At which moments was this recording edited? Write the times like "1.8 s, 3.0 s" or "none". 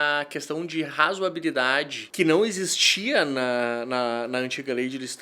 2.0 s